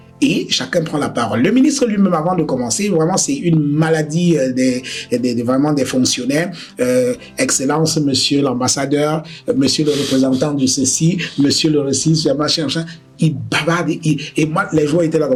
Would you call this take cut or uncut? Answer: uncut